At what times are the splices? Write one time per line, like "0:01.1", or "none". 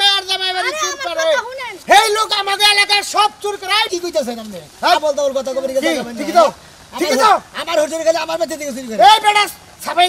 none